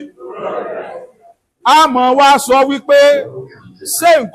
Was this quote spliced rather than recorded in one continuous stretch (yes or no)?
no